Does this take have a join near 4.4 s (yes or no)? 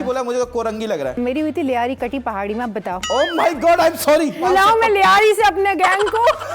yes